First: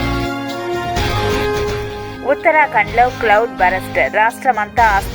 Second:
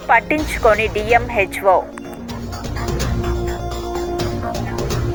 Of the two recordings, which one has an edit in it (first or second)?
first